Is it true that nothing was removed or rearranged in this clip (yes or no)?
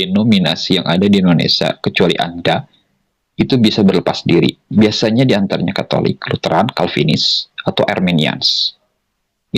yes